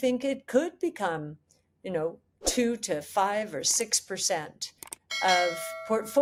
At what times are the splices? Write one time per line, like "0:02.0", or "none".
none